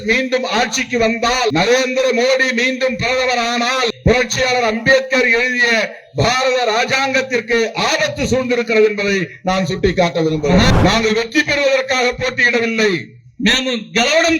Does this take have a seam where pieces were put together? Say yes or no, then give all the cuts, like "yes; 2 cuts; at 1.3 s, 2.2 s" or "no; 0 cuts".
yes; 3 cuts; at 1.5 s, 3.9 s, 10.7 s